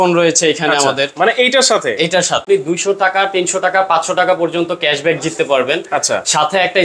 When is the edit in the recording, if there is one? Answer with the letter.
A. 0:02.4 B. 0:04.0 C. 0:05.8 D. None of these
A